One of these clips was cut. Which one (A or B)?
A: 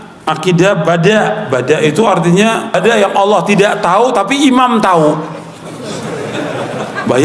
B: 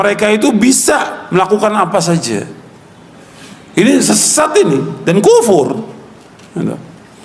A